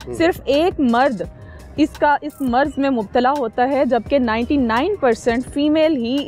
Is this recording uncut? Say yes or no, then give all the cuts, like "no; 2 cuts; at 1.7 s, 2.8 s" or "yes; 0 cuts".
yes; 0 cuts